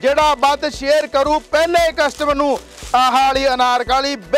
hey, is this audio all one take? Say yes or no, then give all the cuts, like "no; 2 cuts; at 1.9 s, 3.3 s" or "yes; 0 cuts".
yes; 0 cuts